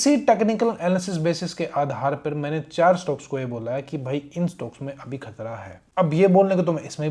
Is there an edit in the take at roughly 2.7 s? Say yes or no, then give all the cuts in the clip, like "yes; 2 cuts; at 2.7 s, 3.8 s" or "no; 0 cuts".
no; 0 cuts